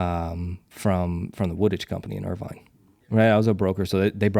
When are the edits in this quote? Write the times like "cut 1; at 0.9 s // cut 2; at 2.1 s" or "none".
cut 1; at 3.0 s

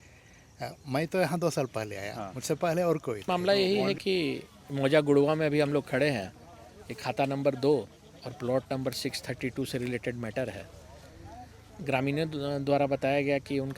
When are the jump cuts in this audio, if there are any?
cut 1; at 3.3 s

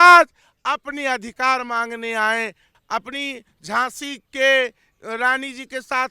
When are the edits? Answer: cut 1; at 2.7 s

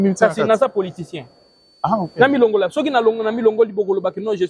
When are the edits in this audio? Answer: none

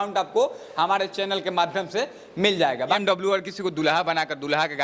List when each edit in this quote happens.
cut 1; at 3.0 s

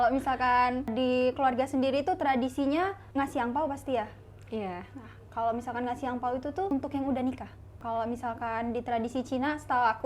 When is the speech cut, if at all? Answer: cut 1; at 0.9 s // cut 2; at 3.0 s // cut 3; at 6.7 s // cut 4; at 7.8 s

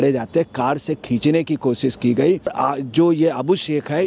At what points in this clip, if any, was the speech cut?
cut 1; at 2.5 s

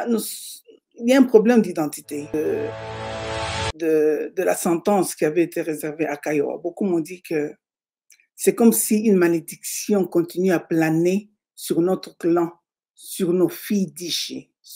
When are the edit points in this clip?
cut 1; at 2.3 s

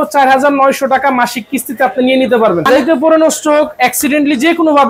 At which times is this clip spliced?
cut 1; at 2.7 s

